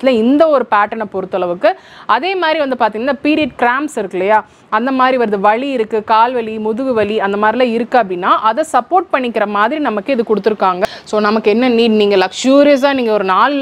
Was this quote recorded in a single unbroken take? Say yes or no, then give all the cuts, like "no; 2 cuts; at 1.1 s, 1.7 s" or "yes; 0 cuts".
no; 1 cut; at 10.8 s